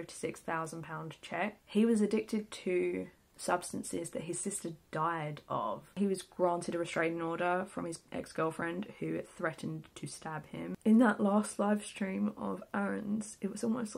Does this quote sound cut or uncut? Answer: cut